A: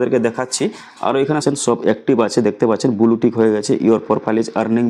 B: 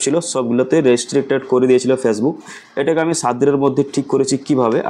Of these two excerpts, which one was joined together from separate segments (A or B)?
A